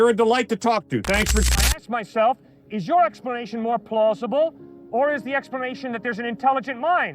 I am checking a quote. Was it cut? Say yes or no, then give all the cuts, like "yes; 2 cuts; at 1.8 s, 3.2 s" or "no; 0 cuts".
yes; 1 cut; at 1.5 s